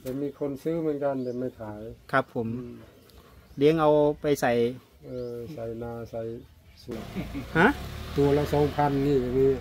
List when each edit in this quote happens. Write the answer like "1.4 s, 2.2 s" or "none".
6.9 s